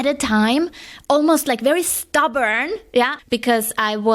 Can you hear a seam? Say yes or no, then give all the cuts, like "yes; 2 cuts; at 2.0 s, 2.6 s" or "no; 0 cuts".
yes; 1 cut; at 3.2 s